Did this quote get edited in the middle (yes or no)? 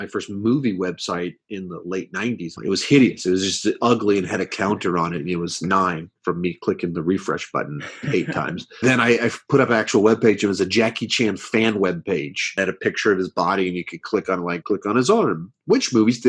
yes